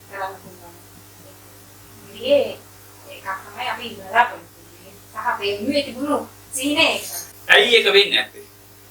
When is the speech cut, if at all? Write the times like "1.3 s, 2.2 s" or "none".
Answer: 7.2 s